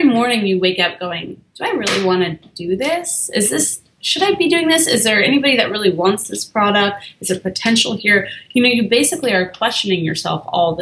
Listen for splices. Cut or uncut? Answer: uncut